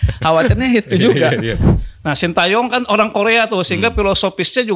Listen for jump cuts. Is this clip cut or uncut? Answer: cut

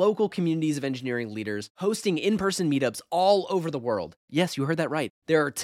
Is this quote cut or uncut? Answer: uncut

